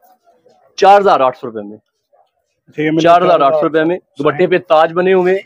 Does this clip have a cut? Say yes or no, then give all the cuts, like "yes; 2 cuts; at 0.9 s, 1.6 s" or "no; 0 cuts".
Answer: no; 0 cuts